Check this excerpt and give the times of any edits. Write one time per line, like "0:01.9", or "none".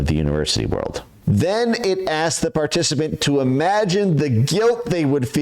0:01.1

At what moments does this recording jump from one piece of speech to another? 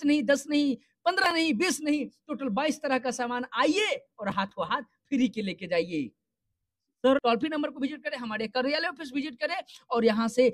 0:07.2

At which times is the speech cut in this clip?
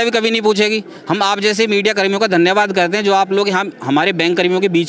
none

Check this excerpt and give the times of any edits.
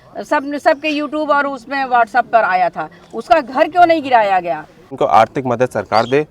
0:04.9

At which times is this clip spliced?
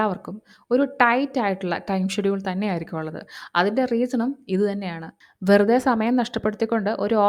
none

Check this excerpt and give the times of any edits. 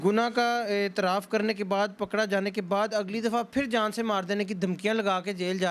none

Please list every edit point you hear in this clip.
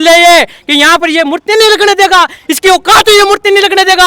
none

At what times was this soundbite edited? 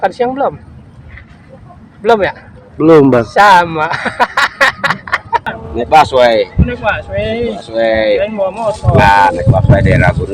0:05.5

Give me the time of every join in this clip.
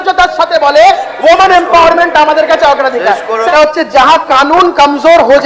0:03.5

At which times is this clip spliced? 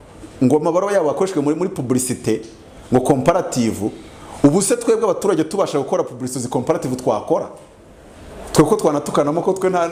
none

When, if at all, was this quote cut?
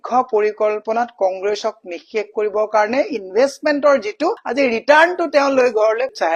none

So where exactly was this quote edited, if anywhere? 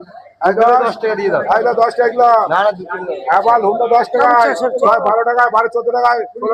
none

